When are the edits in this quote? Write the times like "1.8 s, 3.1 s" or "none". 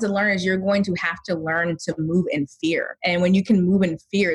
2.9 s